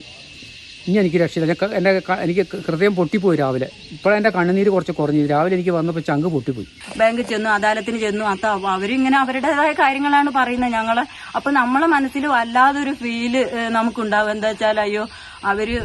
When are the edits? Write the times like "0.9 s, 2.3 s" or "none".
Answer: 6.8 s